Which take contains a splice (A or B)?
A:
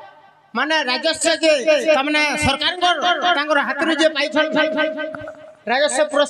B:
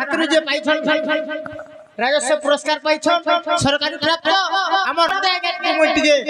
B